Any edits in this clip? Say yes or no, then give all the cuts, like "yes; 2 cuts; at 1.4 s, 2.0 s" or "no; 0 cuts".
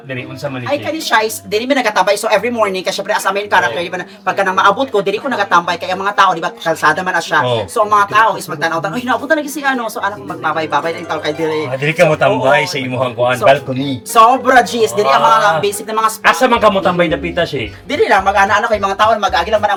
no; 0 cuts